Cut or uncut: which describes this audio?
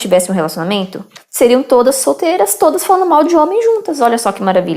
cut